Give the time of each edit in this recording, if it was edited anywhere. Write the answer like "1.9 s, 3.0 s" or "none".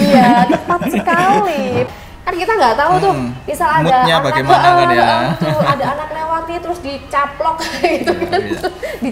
1.9 s

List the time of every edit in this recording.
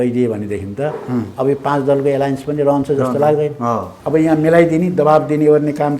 3.9 s

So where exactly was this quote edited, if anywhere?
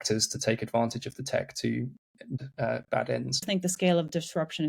2.4 s, 3.4 s

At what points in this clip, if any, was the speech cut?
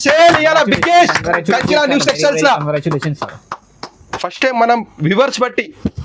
4.1 s

